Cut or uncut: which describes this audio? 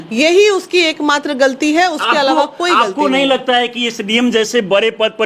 uncut